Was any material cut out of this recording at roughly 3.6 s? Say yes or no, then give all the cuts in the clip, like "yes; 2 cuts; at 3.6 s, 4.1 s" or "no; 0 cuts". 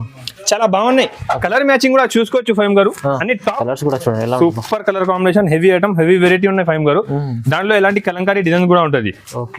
yes; 1 cut; at 3.6 s